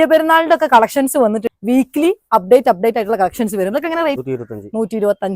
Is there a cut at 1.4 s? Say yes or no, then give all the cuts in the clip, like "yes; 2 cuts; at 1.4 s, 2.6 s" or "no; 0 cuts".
yes; 2 cuts; at 1.4 s, 4.2 s